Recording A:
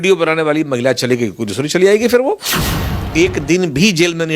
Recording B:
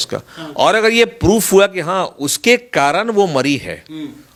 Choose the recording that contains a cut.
A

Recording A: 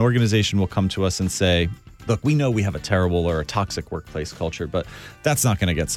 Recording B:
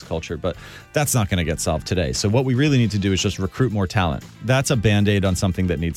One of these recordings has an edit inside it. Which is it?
B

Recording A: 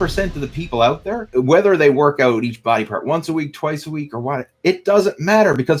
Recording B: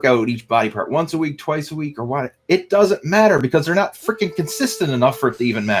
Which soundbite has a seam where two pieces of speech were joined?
A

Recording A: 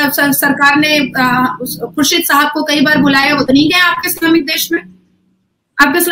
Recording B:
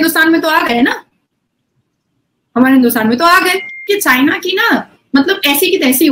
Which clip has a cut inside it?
B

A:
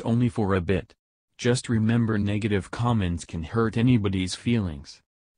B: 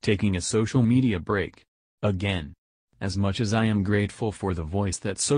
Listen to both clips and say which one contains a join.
B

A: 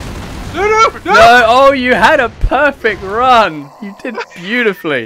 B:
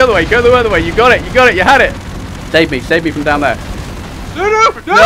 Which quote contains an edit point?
B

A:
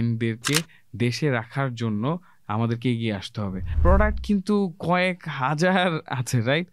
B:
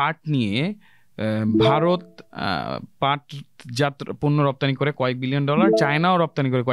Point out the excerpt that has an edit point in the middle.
A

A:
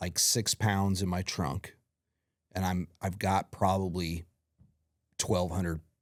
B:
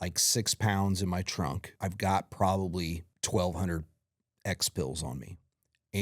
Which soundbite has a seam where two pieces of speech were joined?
B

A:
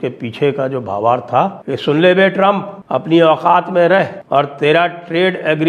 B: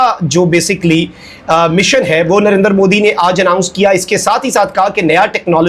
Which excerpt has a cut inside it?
A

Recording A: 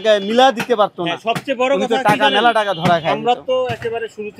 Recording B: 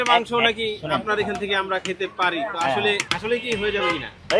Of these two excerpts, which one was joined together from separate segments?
B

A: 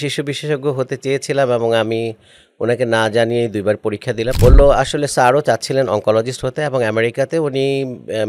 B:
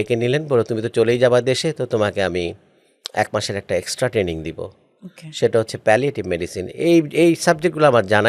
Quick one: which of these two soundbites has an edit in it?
A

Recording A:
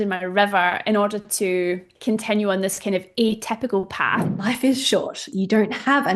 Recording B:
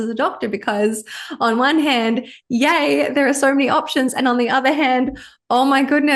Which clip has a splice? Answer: A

